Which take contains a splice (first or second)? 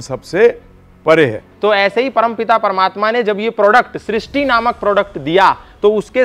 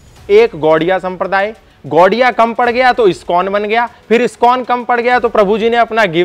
first